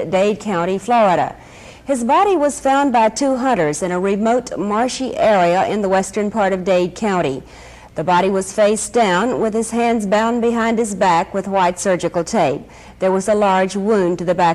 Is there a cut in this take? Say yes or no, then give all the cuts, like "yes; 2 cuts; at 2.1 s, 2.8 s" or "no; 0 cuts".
yes; 1 cut; at 6.4 s